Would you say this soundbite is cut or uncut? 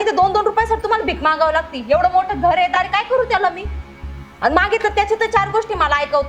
uncut